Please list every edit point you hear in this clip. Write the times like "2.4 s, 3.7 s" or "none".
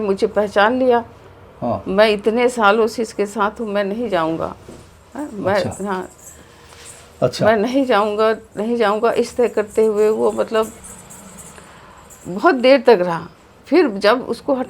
none